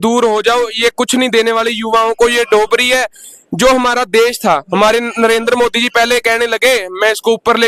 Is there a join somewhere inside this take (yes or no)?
no